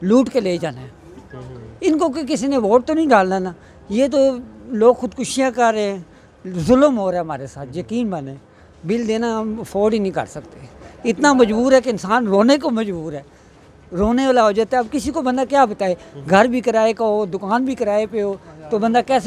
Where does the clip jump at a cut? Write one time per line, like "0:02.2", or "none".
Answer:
none